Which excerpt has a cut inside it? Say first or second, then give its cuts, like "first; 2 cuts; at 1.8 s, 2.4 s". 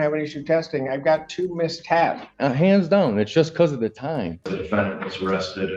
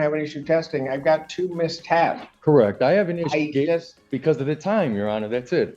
first; 2 cuts; at 2.3 s, 4.6 s